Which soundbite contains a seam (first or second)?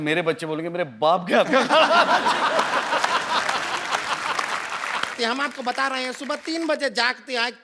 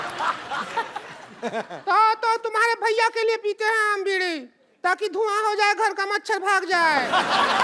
first